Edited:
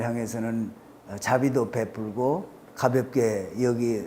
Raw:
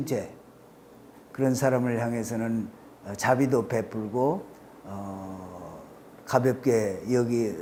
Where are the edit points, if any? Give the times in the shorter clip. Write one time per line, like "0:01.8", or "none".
0:02.6